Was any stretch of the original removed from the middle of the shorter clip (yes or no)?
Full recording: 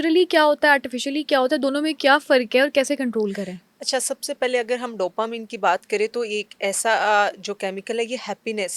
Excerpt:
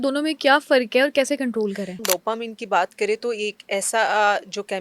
yes